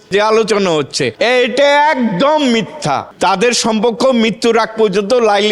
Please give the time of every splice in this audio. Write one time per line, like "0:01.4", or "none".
0:01.0
0:03.1